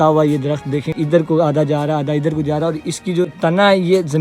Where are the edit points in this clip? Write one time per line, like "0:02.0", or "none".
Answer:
0:00.9
0:03.4

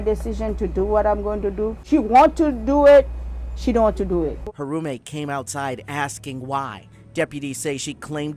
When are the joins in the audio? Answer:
0:01.8
0:04.5

